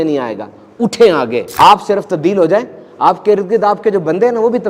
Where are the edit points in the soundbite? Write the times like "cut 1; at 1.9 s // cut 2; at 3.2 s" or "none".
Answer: cut 1; at 1.5 s